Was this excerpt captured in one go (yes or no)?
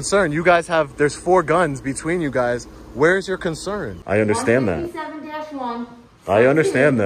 no